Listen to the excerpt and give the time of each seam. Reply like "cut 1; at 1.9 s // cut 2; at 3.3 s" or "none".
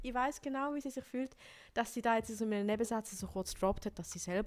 none